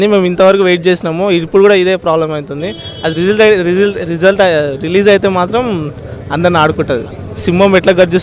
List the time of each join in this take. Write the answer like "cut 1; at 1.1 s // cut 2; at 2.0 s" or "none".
none